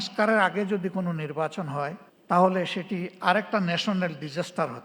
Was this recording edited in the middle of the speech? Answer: no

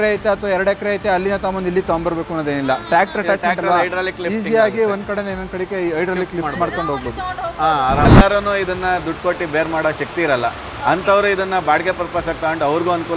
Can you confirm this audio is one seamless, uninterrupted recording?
no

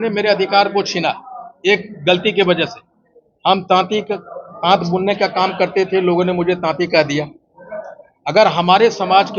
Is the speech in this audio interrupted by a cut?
no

